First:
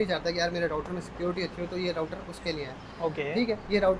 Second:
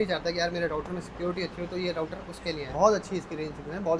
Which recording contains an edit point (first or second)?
second